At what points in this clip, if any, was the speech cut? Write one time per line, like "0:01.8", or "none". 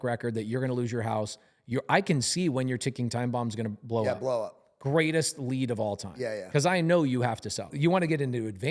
0:07.7

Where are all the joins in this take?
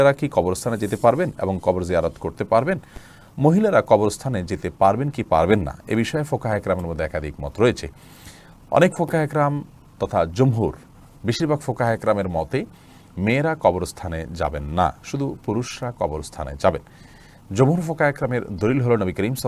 none

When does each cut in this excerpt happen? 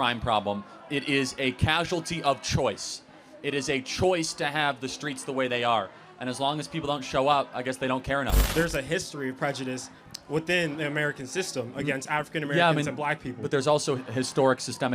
0:08.4

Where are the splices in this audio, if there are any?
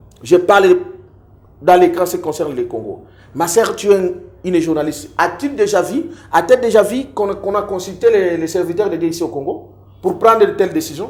none

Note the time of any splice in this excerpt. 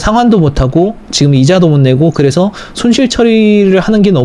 none

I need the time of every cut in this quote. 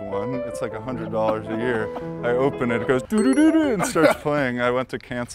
none

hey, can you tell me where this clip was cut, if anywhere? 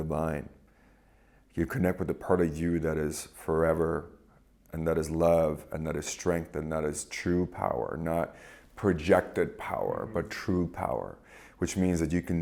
none

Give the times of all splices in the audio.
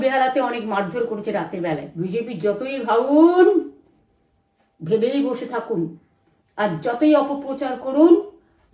0:01.9

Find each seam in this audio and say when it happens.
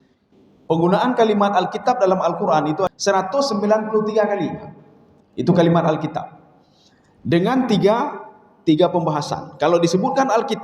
0:02.9

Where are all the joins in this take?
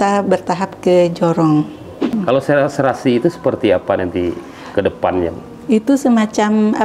0:02.1

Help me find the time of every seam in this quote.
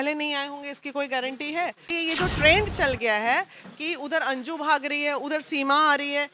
0:01.9

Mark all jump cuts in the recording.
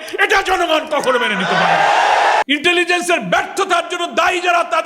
0:02.4

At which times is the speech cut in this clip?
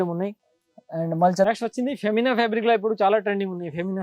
0:01.5

